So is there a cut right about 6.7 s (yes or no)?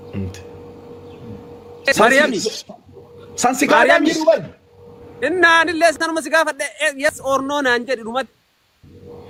no